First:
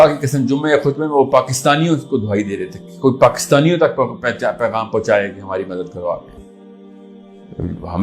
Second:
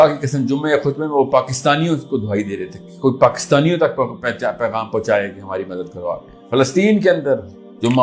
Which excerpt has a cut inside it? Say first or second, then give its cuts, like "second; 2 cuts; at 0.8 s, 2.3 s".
first; 1 cut; at 6.3 s